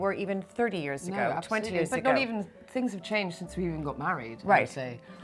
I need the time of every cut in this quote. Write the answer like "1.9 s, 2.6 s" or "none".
none